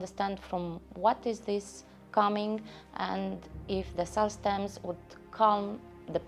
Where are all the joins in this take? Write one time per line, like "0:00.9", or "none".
none